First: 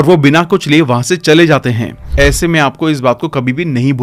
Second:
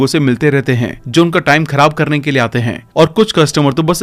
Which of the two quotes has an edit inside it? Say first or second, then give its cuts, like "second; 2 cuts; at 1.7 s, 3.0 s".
first; 1 cut; at 2.0 s